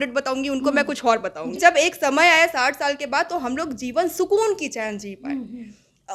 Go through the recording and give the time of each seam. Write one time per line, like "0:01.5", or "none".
0:01.5